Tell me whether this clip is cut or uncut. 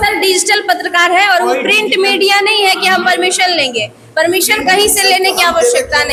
uncut